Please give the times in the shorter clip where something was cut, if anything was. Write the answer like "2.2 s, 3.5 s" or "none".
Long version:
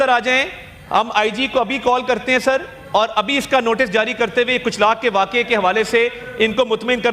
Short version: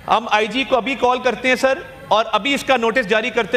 none